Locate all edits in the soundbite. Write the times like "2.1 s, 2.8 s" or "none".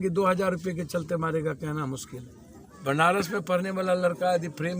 2.7 s